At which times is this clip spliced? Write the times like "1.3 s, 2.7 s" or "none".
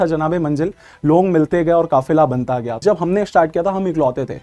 2.8 s